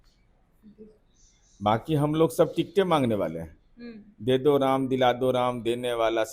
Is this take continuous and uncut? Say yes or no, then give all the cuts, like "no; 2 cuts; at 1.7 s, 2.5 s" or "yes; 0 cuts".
yes; 0 cuts